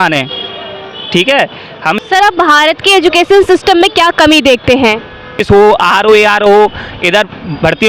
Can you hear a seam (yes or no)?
yes